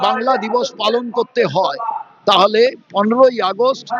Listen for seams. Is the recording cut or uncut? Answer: uncut